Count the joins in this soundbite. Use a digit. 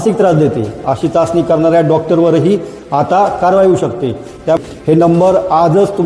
1